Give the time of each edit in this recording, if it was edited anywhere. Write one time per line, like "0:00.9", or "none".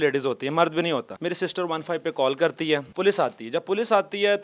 0:01.1
0:02.9